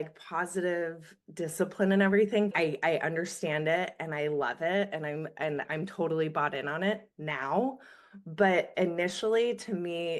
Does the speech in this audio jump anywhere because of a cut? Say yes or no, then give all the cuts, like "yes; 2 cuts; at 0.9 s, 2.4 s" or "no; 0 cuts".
yes; 1 cut; at 2.5 s